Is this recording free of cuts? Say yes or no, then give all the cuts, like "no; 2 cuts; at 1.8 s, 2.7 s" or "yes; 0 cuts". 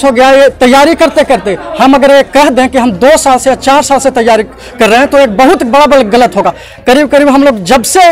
yes; 0 cuts